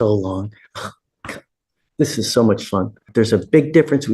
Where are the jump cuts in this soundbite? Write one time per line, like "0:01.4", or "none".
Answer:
0:03.1